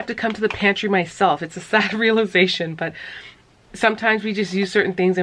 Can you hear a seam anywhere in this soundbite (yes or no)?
no